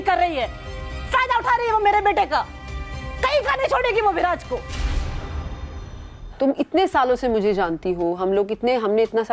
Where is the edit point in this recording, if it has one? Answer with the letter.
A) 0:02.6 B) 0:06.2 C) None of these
B